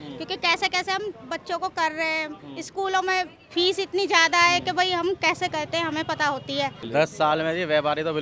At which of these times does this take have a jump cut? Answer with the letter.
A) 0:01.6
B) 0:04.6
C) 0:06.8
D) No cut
C